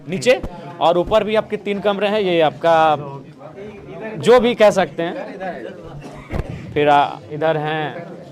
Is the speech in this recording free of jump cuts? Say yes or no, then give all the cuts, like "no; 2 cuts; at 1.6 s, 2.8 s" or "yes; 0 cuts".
yes; 0 cuts